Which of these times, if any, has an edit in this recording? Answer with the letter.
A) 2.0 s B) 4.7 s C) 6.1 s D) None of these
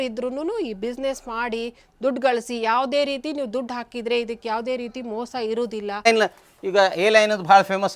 C